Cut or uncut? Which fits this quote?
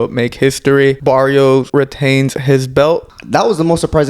cut